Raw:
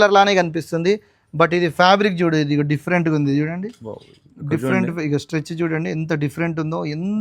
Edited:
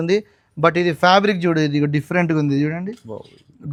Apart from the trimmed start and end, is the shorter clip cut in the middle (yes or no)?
no